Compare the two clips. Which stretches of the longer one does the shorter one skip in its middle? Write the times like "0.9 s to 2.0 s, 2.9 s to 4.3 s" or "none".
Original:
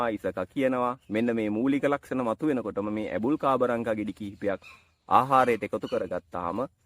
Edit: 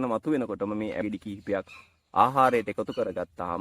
3.2 s to 4.0 s